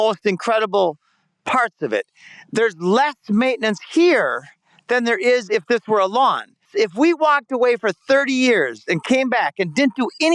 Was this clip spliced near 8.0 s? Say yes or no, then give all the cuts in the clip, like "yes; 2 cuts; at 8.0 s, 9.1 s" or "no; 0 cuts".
no; 1 cut; at 6.7 s